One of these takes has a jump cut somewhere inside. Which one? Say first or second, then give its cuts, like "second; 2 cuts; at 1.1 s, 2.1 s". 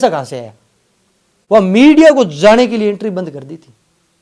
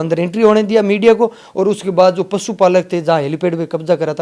first; 1 cut; at 1.3 s